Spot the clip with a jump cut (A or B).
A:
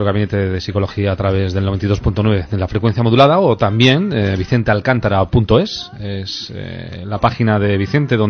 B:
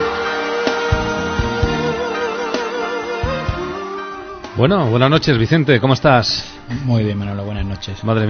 B